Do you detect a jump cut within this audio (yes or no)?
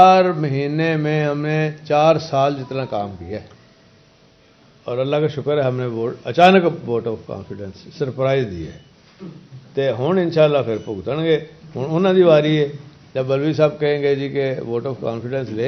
yes